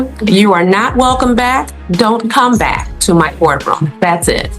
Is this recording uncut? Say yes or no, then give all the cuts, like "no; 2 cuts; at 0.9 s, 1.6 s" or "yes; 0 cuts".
yes; 0 cuts